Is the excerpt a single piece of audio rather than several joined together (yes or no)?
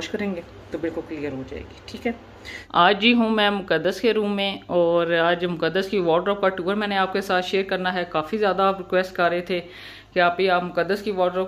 no